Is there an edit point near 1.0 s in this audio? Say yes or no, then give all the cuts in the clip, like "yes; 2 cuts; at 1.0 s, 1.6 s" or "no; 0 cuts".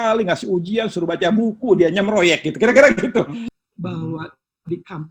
no; 1 cut; at 3.5 s